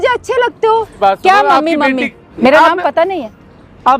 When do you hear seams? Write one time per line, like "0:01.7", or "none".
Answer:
0:01.0
0:02.2